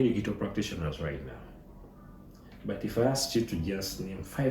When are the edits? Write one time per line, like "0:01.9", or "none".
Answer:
none

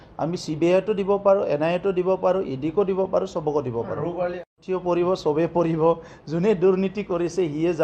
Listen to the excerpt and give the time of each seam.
0:04.4

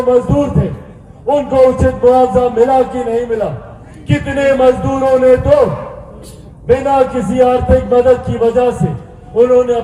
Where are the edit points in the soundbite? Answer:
none

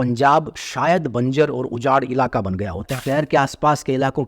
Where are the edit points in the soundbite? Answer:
0:02.9

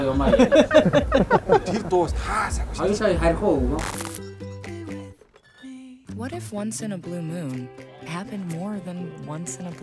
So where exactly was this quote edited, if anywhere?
0:04.0

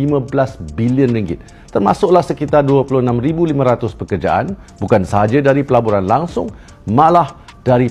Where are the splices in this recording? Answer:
none

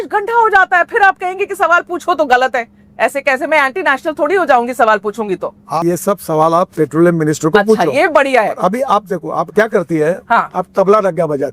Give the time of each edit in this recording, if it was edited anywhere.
0:05.8

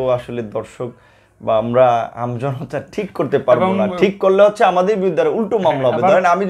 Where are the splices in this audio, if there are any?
none

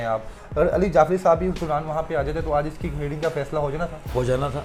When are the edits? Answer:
none

